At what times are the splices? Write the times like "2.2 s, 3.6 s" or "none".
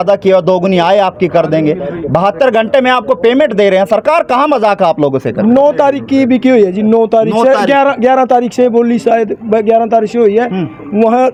none